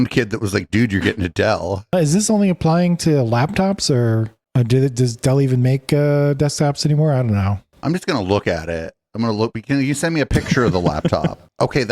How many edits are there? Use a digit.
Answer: 2